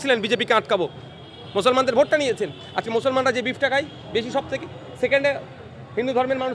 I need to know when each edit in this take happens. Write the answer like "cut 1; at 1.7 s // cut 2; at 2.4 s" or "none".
none